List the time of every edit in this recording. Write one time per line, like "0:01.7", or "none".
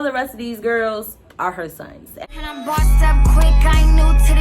0:02.2